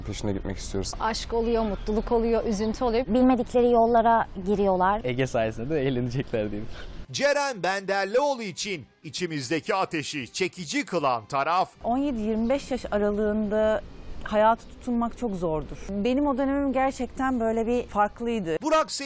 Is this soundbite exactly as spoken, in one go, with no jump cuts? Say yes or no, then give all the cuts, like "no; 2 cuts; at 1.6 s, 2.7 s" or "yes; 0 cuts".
yes; 0 cuts